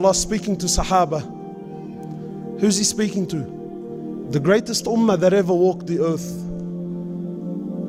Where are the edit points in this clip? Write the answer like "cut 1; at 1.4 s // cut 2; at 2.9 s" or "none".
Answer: none